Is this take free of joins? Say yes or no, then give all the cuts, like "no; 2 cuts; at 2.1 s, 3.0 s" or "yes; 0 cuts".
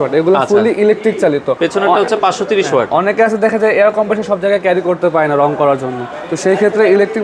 yes; 0 cuts